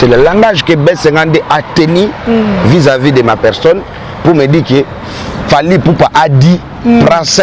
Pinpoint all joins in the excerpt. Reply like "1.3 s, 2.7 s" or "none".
none